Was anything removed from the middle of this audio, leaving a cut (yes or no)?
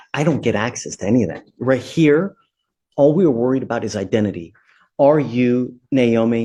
no